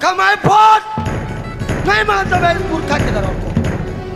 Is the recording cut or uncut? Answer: uncut